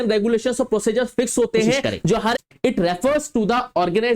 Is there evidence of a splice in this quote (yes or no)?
yes